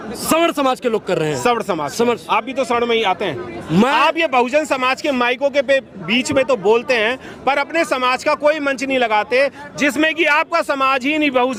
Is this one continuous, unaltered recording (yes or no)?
yes